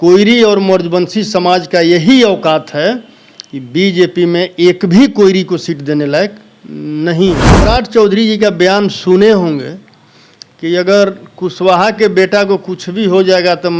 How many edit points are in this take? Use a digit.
1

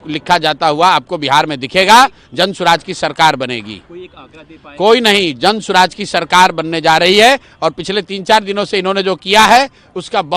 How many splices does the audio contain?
0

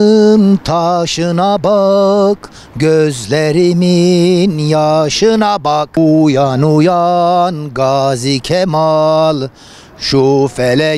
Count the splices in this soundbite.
1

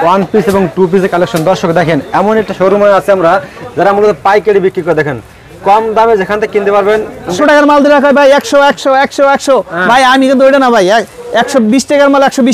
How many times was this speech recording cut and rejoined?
1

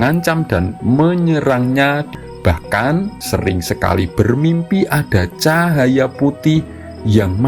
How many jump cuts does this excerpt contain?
2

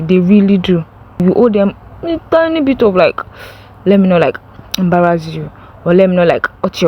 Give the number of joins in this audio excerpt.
1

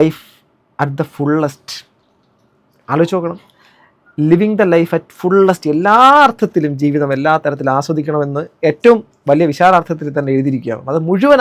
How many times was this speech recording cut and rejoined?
0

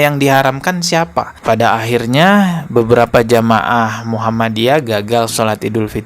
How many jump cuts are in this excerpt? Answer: 1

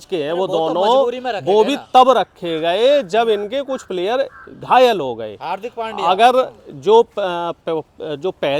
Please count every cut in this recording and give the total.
0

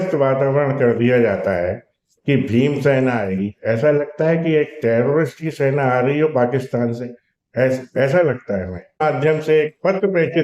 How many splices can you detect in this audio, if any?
1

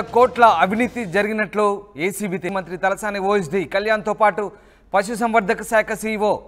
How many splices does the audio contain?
1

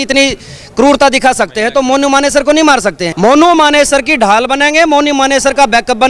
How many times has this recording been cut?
1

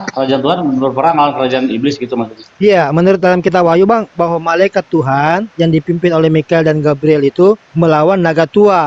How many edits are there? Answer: 2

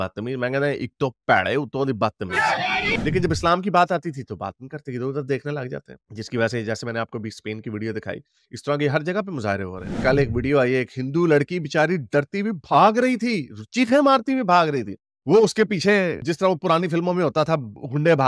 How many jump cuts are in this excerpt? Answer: 2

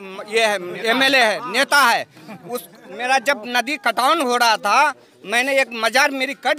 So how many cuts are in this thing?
0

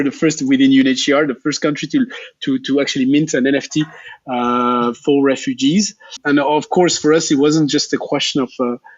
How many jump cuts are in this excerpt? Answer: 1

